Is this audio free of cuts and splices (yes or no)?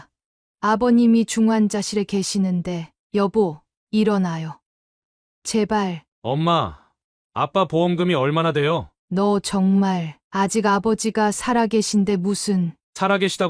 no